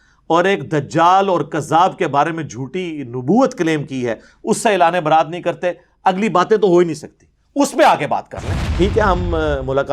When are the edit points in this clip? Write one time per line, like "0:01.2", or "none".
0:08.7